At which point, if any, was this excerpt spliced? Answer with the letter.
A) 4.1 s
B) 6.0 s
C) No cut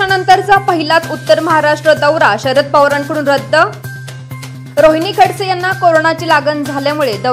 A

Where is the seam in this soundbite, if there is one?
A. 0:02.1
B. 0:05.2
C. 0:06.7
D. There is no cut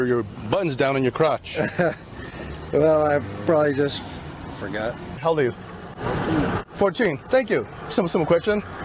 B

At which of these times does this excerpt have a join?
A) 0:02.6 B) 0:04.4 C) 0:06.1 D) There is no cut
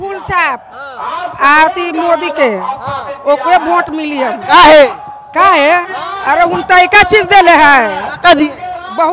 D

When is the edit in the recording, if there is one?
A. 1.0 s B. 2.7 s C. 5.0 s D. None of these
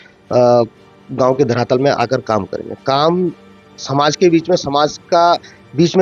D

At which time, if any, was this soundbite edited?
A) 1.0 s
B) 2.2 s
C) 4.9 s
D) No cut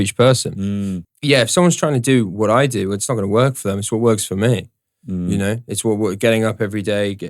A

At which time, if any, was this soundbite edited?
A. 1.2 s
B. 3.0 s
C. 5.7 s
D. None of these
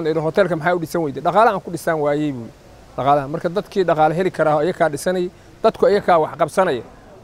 D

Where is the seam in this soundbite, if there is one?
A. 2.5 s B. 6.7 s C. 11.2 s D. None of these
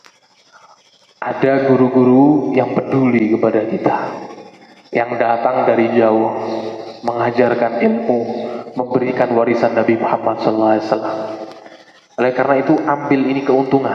D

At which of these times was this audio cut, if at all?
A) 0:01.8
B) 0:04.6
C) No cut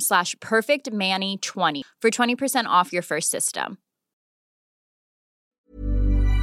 A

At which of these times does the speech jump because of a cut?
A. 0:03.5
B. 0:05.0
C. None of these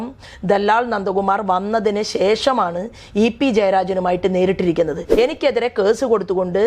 B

